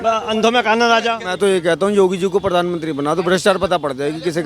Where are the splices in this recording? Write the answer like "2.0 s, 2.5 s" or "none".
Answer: 1.3 s